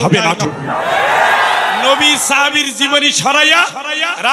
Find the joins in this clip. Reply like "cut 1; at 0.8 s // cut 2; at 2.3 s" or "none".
cut 1; at 1.8 s